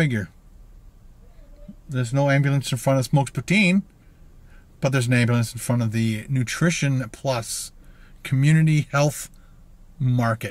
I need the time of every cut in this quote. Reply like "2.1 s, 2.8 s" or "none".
none

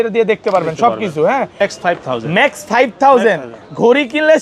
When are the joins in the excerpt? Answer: 1.6 s

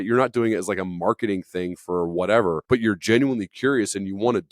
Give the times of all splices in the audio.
2.6 s

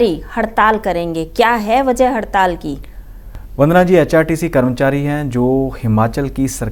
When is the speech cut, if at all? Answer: none

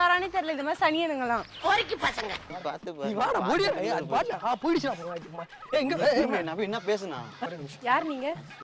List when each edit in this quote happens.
2.5 s, 7.3 s

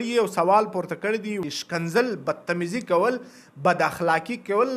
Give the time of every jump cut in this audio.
1.4 s

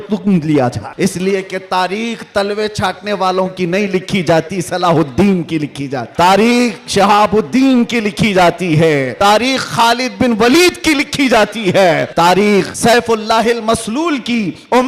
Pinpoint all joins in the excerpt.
0.9 s, 6.0 s, 9.1 s, 12.1 s, 12.7 s

